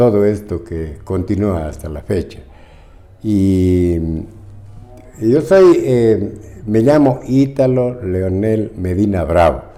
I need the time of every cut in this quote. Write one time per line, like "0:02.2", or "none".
none